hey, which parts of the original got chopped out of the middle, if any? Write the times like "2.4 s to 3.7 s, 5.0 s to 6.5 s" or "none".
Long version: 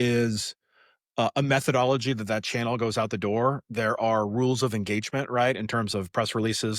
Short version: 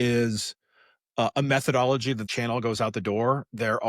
2.3 s to 2.4 s